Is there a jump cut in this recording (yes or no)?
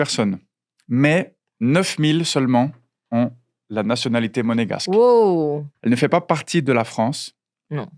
yes